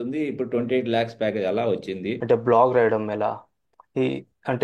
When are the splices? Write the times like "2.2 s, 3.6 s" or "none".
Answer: 2.2 s